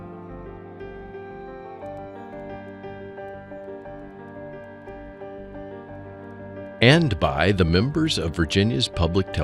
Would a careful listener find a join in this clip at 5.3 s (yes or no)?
no